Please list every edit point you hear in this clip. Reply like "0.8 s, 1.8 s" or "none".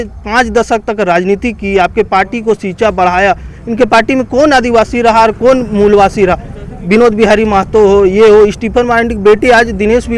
none